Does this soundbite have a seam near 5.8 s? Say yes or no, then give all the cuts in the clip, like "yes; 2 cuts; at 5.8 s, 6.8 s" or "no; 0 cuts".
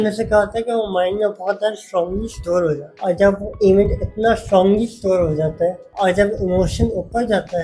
yes; 1 cut; at 5.8 s